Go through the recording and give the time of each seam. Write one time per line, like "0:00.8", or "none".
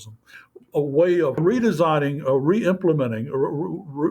0:01.4